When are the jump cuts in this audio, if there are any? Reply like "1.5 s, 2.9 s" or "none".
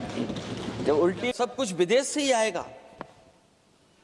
1.3 s